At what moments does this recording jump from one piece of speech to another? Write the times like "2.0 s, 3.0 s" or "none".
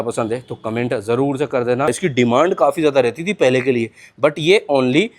1.9 s